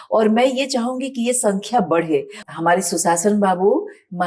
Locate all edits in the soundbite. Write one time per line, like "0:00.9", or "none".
0:02.4